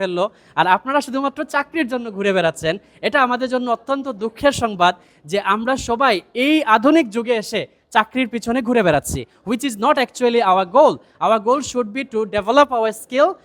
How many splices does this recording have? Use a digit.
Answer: 0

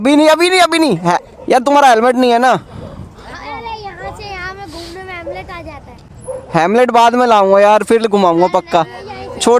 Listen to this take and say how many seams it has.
0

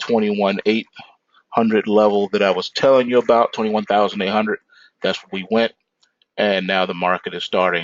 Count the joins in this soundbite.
1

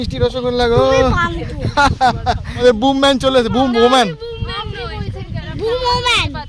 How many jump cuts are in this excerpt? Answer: 1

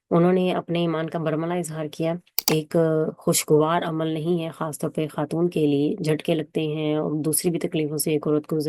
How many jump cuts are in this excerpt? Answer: 1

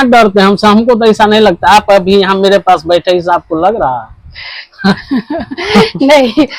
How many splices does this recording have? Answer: 0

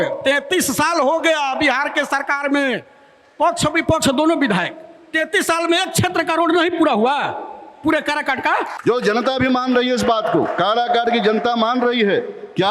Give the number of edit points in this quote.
1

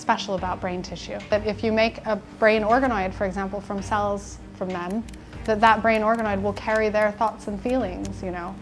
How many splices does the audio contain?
1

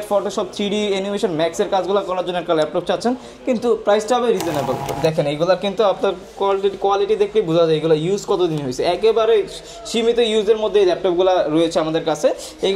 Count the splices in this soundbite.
1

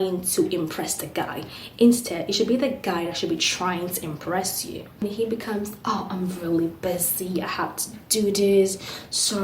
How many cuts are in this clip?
1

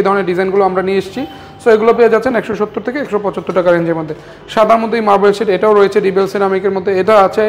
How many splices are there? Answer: 0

